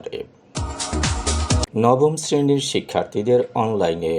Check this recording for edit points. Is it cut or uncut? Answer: cut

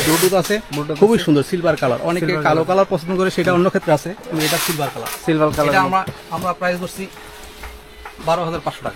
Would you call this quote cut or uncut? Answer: uncut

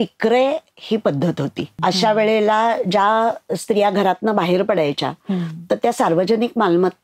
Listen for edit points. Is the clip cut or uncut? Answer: cut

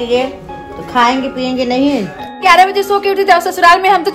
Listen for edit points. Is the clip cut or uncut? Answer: cut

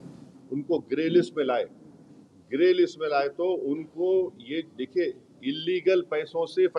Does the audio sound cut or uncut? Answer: uncut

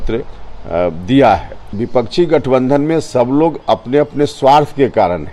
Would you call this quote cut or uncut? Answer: cut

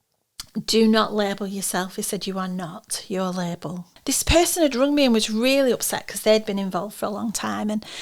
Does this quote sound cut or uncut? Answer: cut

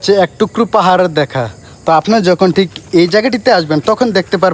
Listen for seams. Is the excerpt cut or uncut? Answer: uncut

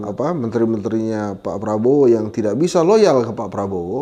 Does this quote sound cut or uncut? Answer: uncut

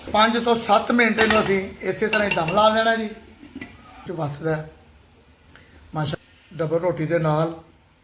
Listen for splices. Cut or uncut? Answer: cut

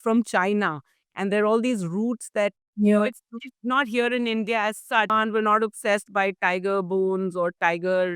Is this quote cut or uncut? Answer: cut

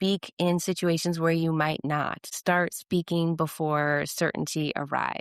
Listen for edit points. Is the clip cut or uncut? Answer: cut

